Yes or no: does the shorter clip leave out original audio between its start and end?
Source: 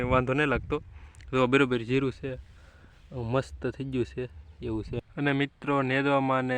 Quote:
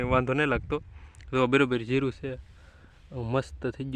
no